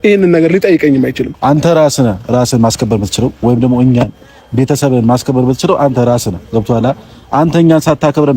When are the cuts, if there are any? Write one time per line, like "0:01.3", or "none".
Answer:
0:01.3